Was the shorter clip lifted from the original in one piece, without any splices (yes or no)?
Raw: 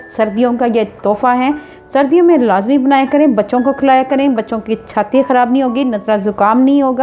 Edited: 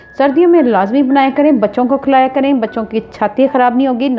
yes